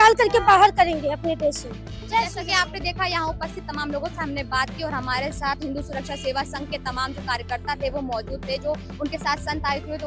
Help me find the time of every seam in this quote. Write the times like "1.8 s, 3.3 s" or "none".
none

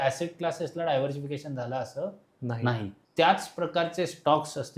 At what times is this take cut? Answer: 3.0 s

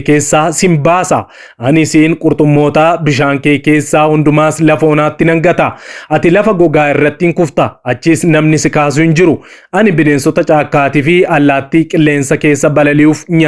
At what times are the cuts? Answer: none

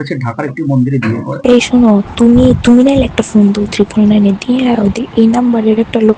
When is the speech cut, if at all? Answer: 1.3 s

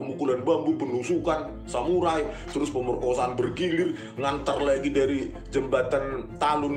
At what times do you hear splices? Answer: none

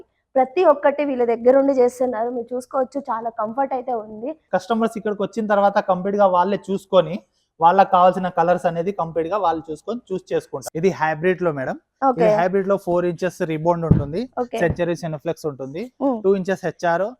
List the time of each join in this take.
4.4 s, 10.6 s

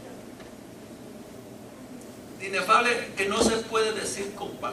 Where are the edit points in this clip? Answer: none

